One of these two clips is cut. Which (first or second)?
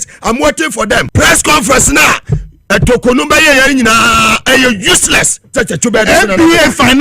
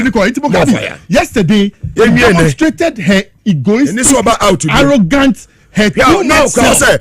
first